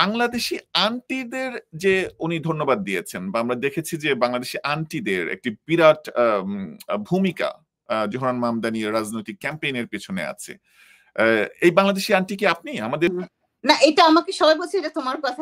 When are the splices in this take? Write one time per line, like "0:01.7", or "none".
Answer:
0:13.1